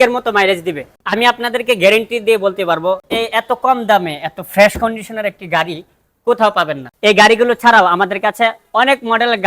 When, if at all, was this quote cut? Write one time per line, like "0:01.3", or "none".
0:00.9
0:06.8